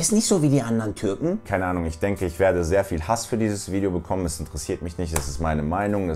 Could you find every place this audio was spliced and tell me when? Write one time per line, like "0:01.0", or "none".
0:01.4